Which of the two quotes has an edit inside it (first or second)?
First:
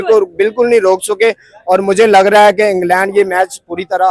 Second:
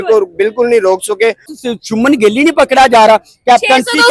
second